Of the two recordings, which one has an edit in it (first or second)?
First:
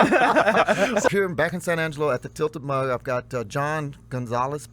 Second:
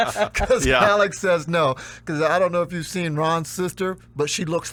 first